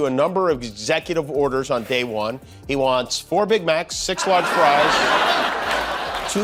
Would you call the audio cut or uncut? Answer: uncut